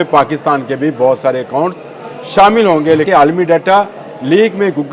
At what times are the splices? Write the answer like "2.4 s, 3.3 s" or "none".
3.1 s